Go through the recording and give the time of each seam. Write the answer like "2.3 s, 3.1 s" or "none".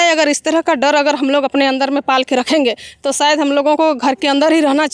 none